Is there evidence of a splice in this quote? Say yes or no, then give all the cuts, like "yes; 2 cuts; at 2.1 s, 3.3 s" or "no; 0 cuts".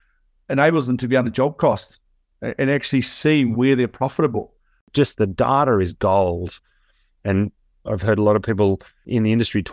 yes; 1 cut; at 4.9 s